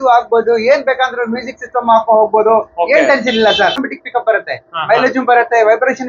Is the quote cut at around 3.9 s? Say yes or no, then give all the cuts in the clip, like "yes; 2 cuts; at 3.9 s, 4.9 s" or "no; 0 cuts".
yes; 1 cut; at 3.9 s